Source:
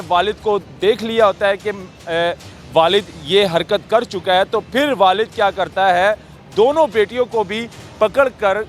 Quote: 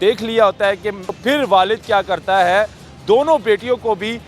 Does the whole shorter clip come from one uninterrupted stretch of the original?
no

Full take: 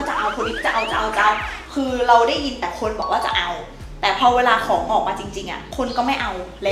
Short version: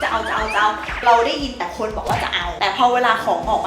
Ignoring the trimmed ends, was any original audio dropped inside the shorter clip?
yes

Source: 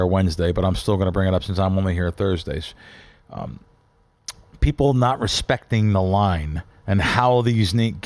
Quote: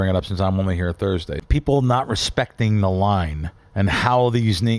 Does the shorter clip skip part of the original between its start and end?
yes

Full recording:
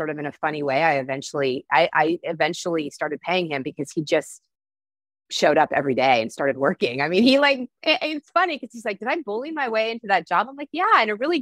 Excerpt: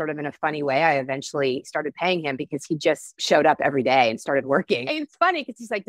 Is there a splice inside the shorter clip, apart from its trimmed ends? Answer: yes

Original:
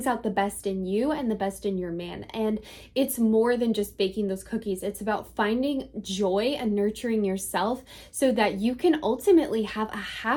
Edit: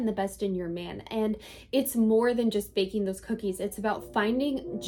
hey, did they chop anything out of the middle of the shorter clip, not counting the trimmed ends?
no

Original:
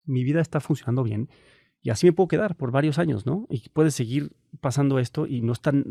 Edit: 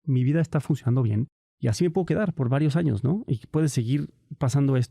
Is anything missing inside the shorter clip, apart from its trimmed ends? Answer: yes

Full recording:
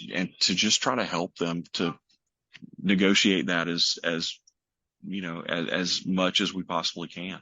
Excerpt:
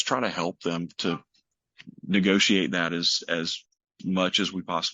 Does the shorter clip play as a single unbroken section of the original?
no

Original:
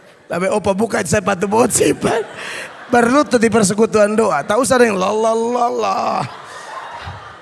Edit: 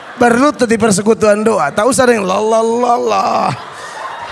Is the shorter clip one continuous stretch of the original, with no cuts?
yes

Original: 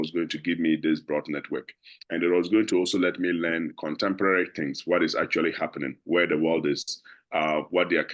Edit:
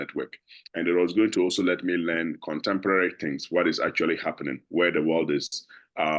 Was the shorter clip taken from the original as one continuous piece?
yes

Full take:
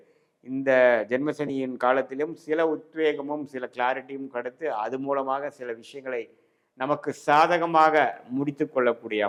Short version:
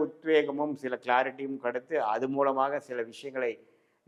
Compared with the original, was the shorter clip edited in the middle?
no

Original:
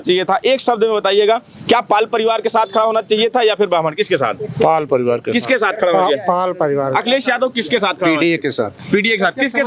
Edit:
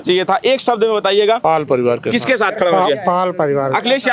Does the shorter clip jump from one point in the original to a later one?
yes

